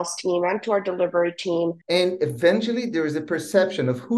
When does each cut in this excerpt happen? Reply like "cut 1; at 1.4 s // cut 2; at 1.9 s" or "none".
cut 1; at 1.8 s

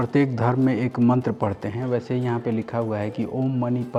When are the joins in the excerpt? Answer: none

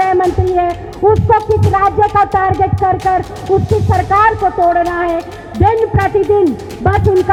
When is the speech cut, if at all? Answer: none

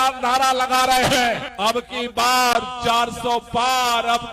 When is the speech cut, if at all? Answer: cut 1; at 1.5 s

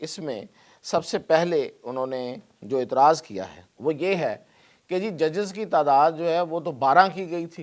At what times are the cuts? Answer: cut 1; at 3.6 s

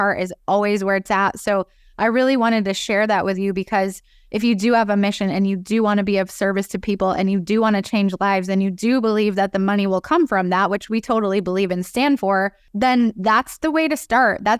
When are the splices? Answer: cut 1; at 12.6 s

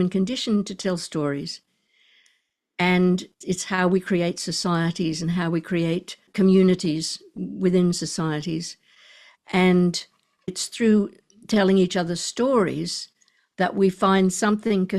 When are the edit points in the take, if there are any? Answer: cut 1; at 3.4 s // cut 2; at 6.2 s // cut 3; at 10.5 s

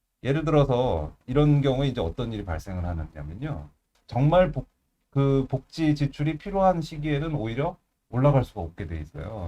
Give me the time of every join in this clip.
cut 1; at 4.0 s

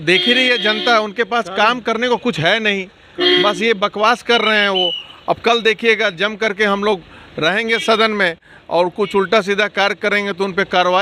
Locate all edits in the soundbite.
none

